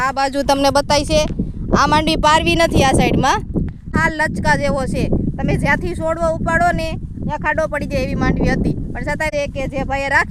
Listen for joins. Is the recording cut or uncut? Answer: cut